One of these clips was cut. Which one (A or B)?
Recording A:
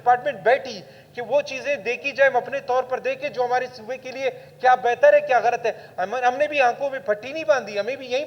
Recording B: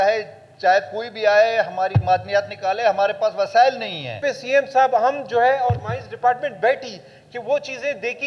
B